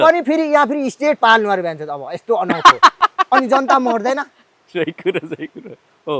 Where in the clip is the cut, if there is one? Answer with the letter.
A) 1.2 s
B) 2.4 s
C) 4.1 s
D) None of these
D